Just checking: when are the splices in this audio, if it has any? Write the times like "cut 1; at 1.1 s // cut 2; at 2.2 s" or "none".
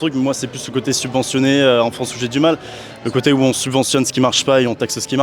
none